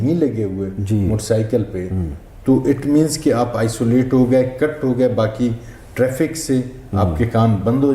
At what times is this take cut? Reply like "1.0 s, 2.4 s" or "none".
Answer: none